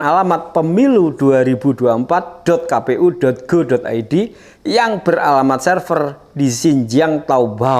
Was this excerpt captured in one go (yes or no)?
yes